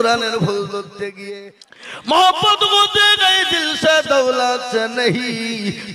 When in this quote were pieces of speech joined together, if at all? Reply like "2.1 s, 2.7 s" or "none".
1.2 s